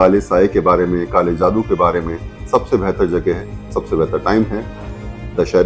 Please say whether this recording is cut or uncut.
uncut